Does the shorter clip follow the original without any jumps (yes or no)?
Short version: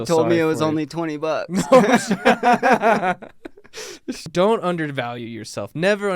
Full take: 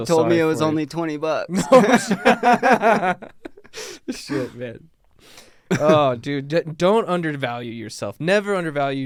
no